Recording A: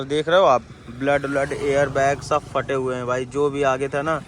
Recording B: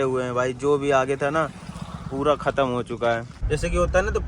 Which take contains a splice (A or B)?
B